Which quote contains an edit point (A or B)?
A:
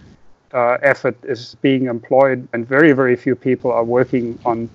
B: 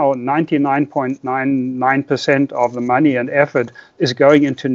A